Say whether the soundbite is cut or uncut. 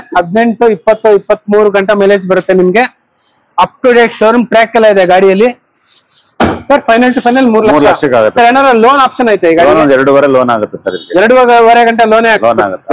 uncut